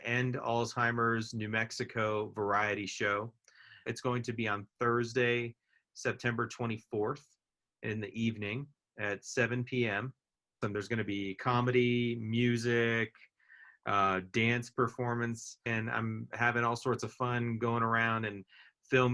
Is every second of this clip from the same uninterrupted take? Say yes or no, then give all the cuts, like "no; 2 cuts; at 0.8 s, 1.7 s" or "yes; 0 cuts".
no; 3 cuts; at 3.8 s, 10.6 s, 15.7 s